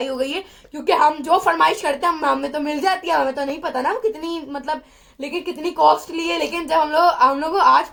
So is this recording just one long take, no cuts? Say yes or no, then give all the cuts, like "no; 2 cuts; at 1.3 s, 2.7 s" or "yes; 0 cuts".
yes; 0 cuts